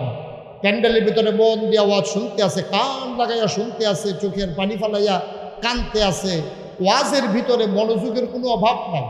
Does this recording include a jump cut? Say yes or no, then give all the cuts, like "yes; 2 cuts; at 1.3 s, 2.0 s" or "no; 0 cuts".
no; 0 cuts